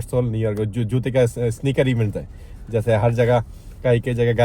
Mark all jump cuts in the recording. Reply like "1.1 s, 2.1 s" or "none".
none